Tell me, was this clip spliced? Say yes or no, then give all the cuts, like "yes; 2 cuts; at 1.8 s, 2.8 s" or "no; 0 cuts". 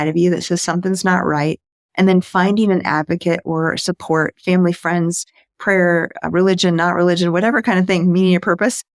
no; 0 cuts